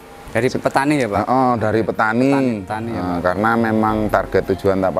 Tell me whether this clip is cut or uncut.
uncut